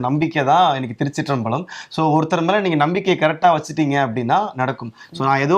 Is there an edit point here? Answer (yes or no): no